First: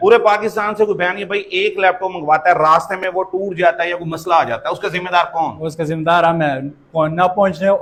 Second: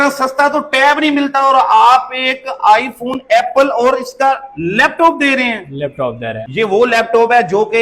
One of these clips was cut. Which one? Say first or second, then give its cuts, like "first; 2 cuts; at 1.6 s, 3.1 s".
second; 1 cut; at 6.4 s